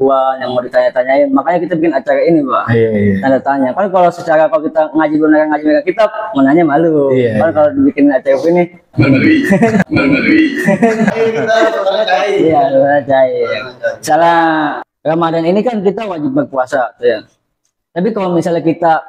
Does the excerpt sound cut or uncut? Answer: uncut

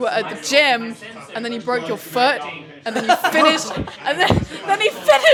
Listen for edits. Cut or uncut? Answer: uncut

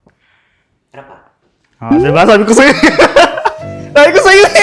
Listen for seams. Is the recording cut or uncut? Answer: uncut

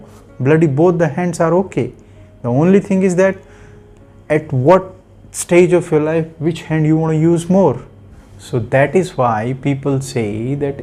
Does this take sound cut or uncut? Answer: uncut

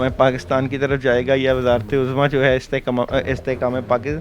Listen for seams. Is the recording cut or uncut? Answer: uncut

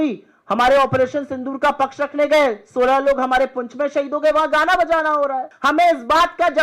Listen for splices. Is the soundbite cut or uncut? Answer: cut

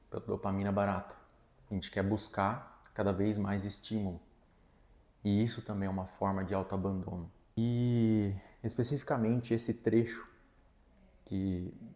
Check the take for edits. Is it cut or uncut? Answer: cut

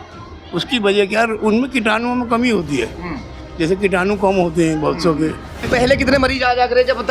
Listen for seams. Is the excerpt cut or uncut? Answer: cut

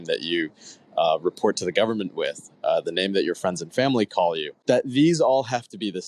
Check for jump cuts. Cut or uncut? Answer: cut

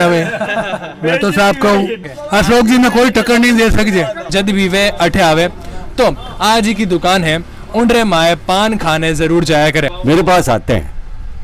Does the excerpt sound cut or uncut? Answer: cut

